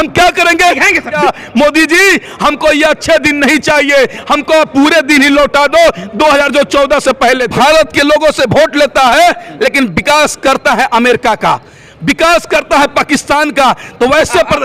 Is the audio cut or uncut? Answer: cut